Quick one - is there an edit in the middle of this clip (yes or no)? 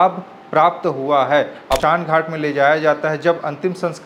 yes